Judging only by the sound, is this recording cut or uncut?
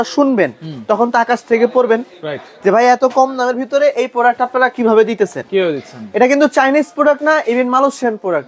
uncut